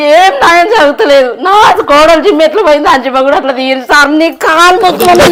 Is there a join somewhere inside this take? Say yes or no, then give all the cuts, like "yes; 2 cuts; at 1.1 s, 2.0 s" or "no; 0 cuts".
no; 0 cuts